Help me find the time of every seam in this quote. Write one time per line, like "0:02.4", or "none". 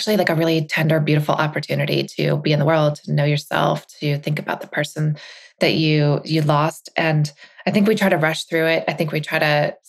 none